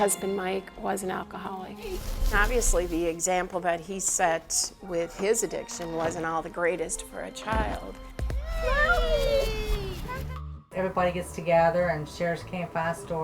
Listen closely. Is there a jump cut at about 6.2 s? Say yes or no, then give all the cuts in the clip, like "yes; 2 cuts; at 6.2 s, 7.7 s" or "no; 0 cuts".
no; 2 cuts; at 2.1 s, 10.3 s